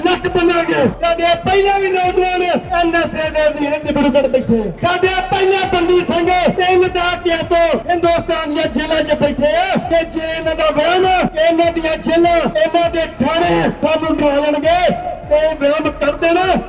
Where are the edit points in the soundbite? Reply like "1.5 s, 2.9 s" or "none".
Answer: 1.0 s, 2.7 s, 4.7 s, 6.6 s, 7.8 s, 9.9 s, 11.3 s, 12.5 s, 13.8 s